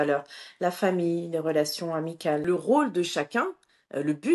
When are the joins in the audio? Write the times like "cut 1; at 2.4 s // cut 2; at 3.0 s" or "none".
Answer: cut 1; at 2.4 s